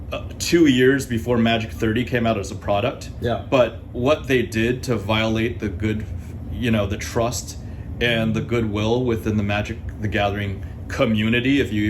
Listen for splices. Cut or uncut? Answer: uncut